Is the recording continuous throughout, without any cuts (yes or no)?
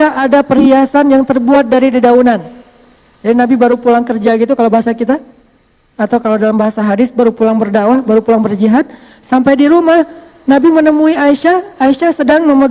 yes